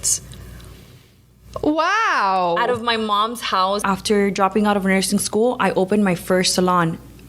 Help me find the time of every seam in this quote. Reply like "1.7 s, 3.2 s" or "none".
3.8 s